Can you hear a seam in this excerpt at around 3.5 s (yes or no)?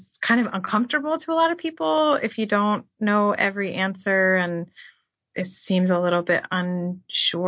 no